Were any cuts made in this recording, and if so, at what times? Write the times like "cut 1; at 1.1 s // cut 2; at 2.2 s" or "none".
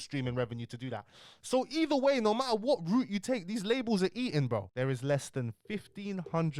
cut 1; at 4.7 s